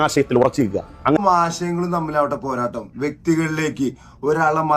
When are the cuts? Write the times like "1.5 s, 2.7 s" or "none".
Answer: 1.2 s